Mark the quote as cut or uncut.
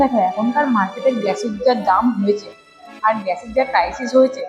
uncut